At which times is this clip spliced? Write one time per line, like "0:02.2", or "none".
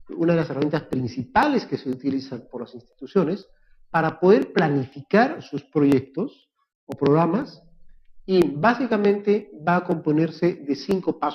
0:07.8